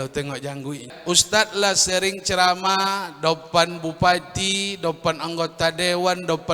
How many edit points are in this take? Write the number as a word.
one